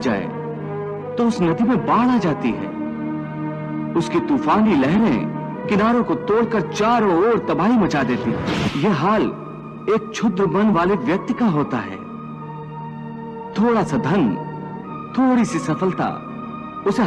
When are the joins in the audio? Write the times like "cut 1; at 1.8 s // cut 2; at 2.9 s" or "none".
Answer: cut 1; at 8.5 s